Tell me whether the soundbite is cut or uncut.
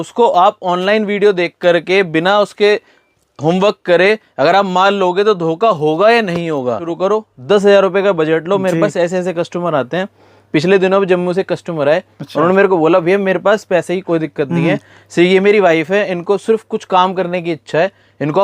cut